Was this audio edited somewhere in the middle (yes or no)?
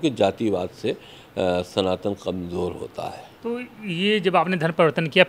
no